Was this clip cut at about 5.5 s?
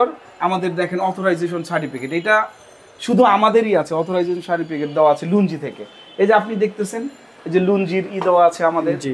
no; 0 cuts

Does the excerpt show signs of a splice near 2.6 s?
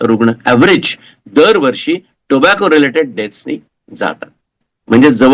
no; 0 cuts

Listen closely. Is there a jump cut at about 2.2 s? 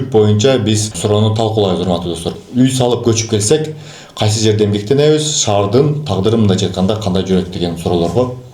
yes; 2 cuts; at 0.9 s, 2.2 s

